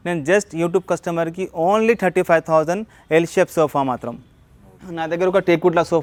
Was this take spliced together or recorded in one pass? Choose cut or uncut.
uncut